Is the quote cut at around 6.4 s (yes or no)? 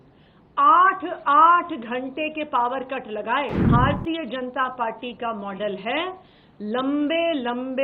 no